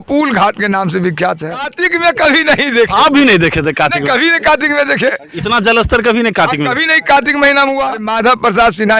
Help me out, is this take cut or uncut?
cut